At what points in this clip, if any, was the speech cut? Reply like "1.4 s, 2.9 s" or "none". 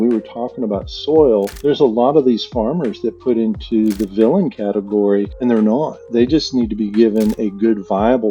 1.5 s, 5.3 s